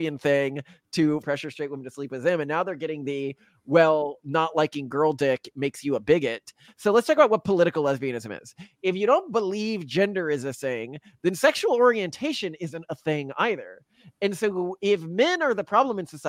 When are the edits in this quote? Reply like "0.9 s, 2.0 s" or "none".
1.2 s, 6.7 s